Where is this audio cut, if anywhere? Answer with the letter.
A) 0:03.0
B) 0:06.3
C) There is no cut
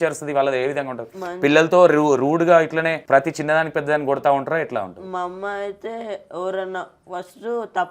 A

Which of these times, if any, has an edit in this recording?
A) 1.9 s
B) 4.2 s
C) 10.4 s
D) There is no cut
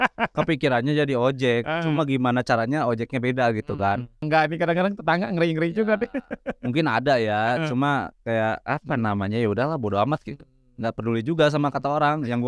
B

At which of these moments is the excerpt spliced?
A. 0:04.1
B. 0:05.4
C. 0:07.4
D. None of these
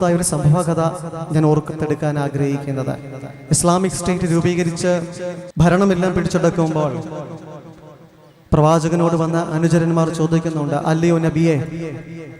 B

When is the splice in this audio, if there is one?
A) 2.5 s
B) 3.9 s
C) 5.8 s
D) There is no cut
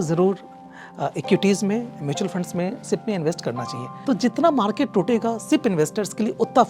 B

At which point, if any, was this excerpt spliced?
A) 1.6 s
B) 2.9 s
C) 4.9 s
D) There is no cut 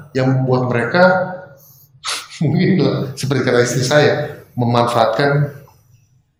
D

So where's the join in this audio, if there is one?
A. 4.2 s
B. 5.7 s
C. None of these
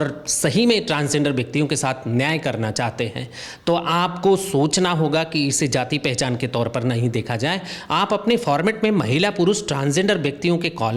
C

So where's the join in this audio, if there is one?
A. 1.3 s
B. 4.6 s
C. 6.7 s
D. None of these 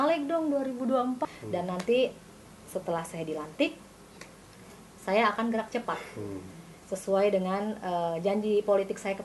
A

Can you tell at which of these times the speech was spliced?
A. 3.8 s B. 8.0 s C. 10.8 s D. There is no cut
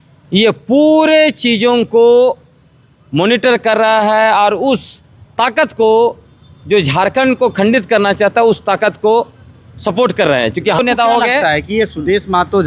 C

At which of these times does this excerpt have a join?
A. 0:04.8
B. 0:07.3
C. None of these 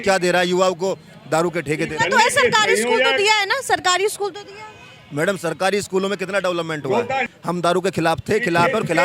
B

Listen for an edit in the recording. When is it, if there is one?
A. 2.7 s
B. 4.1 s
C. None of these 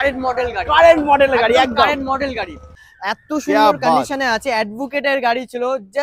A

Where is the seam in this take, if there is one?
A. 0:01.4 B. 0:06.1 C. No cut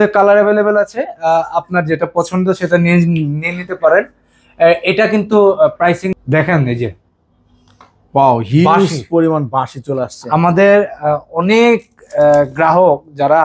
B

